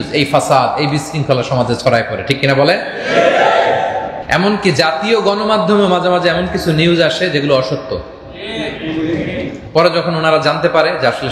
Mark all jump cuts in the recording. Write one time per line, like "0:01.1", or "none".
0:04.2
0:09.6